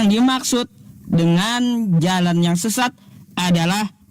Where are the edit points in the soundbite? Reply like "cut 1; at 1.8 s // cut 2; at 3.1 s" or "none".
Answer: none